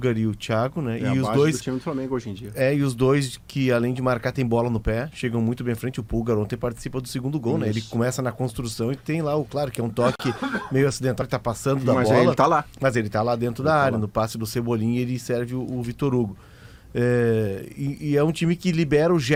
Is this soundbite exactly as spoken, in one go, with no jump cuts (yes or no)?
yes